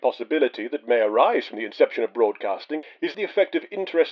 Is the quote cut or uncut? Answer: cut